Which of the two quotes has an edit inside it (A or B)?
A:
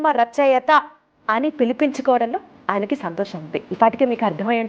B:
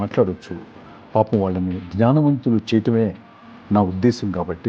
A